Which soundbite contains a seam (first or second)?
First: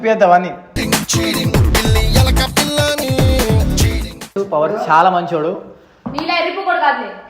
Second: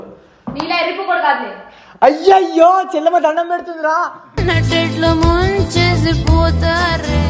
first